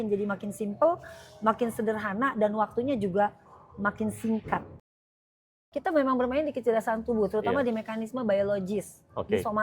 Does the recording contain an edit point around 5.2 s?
yes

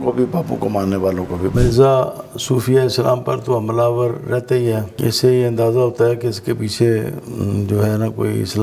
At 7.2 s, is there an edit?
no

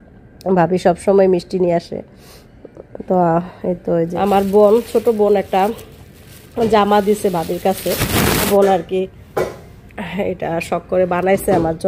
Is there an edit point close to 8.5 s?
yes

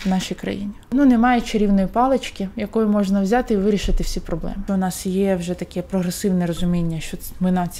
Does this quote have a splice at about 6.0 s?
no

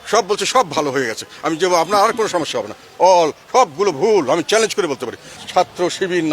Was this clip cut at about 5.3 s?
yes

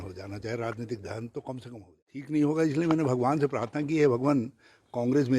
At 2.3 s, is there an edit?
yes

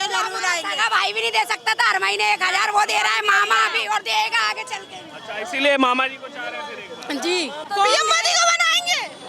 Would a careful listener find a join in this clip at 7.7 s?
yes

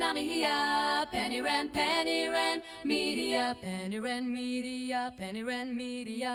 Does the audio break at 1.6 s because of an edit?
no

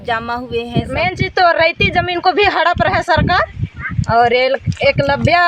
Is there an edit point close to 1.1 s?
yes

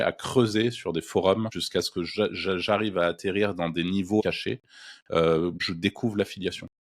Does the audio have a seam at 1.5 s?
yes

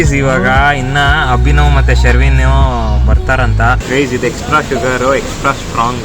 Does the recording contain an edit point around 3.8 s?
yes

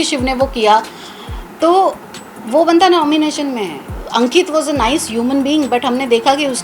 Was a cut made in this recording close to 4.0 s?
yes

